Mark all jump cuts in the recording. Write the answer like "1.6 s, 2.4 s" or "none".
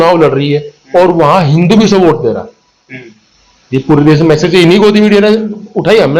none